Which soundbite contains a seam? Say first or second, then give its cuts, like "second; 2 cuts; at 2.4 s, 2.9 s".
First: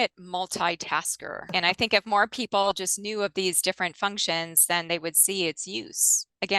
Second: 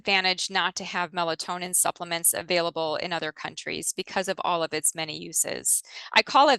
first; 1 cut; at 1.4 s